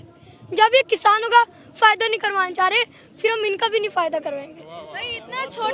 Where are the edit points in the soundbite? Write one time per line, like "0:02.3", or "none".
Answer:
none